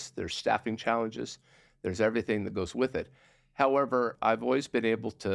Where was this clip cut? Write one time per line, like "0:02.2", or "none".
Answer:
0:04.1